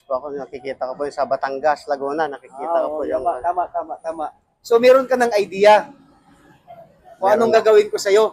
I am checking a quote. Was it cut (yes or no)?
no